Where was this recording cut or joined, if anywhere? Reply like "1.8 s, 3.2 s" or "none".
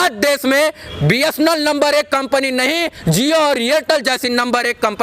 none